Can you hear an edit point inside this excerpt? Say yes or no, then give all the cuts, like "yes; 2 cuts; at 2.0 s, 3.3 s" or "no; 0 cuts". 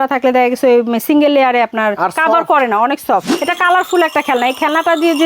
yes; 1 cut; at 3.4 s